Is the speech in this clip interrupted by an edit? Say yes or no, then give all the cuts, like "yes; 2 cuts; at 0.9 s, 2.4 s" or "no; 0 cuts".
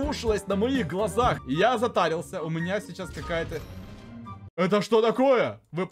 yes; 1 cut; at 1.4 s